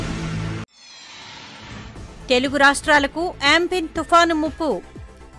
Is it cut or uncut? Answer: uncut